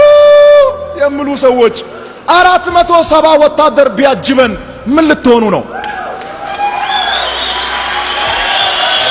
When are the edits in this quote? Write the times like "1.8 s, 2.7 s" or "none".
none